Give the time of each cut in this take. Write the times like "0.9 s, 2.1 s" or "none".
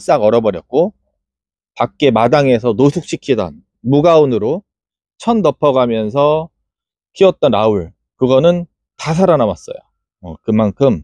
none